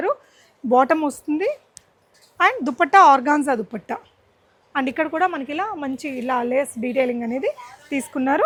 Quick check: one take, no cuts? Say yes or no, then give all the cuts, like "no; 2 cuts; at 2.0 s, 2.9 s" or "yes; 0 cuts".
yes; 0 cuts